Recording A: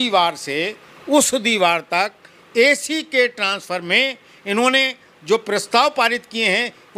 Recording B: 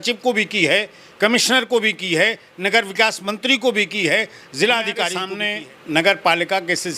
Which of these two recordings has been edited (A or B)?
B